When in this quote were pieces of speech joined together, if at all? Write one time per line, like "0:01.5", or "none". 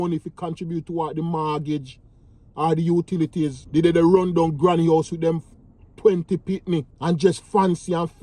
0:03.6
0:06.9